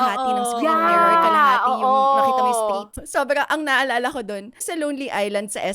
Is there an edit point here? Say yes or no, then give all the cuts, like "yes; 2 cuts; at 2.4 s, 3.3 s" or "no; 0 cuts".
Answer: yes; 2 cuts; at 3.0 s, 4.6 s